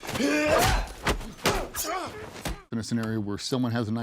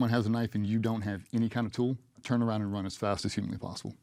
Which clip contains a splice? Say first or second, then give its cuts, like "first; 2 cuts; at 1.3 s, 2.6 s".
first; 1 cut; at 2.7 s